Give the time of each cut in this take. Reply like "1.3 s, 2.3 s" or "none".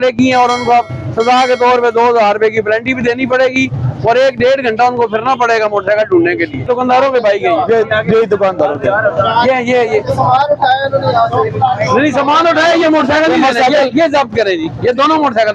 none